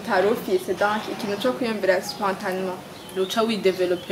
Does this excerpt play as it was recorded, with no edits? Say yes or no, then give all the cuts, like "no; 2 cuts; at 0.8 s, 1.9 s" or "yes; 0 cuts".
yes; 0 cuts